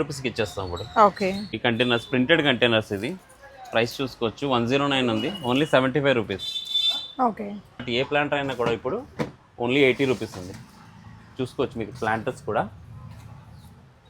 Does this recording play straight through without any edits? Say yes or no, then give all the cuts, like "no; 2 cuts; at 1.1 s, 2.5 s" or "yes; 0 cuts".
no; 2 cuts; at 1.6 s, 7.9 s